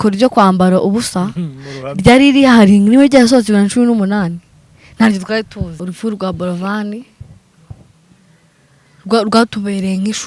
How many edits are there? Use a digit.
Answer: 1